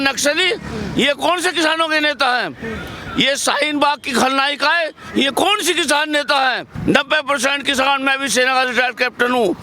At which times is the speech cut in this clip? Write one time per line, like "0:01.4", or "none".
0:06.7